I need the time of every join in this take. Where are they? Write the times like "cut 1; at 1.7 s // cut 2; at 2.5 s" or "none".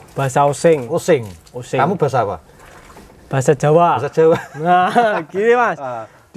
none